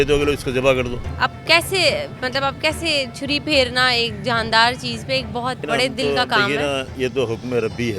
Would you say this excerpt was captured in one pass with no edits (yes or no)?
no